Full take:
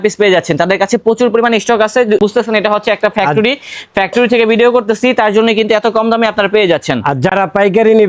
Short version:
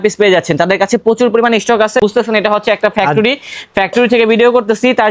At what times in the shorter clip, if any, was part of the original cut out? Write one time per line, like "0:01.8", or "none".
0:02.0